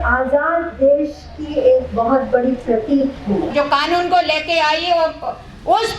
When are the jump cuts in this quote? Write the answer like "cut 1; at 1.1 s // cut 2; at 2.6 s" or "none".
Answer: cut 1; at 3.5 s